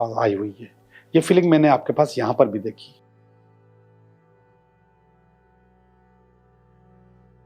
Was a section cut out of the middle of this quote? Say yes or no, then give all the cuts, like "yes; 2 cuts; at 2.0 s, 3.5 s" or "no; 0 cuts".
no; 0 cuts